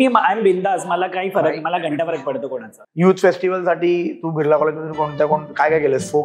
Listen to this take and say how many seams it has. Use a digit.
1